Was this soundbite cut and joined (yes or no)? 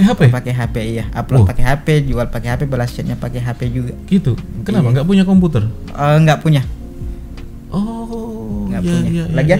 no